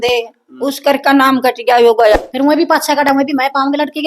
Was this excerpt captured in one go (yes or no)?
no